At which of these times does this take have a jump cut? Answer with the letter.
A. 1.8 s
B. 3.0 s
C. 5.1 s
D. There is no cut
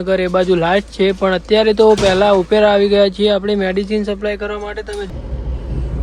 C